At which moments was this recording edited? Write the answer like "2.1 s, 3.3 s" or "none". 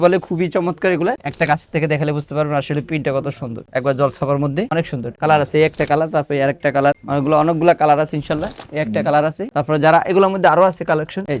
none

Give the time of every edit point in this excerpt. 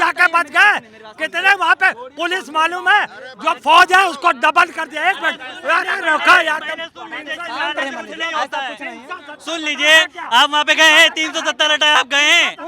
none

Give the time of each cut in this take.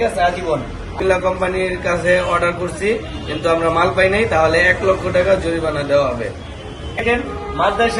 0.9 s, 7.0 s

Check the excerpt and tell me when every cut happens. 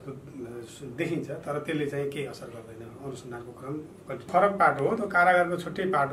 4.3 s

